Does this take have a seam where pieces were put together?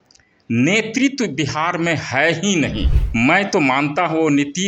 yes; 1 cut; at 3.0 s

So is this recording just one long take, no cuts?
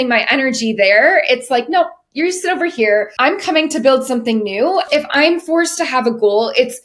no; 1 cut; at 4.9 s

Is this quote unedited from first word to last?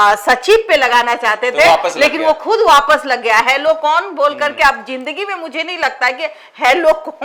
yes; 0 cuts

